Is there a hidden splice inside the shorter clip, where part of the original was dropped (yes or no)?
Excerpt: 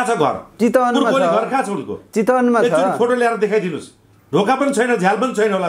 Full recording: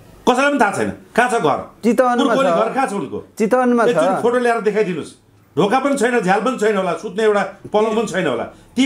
no